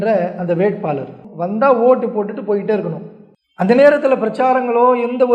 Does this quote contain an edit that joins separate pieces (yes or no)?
yes